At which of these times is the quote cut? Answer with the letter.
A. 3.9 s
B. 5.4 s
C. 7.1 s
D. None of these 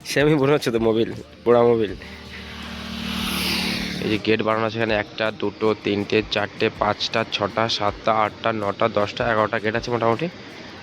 A